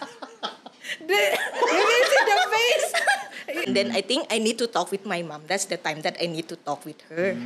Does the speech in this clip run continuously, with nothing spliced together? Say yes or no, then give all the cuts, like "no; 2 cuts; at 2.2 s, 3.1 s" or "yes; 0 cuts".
no; 1 cut; at 3.7 s